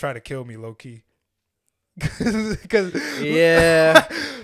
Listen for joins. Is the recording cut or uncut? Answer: uncut